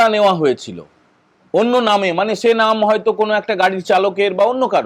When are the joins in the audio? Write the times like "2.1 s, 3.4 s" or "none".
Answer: none